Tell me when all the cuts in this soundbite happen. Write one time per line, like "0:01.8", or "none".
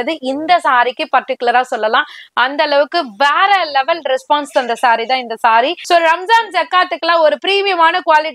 0:05.8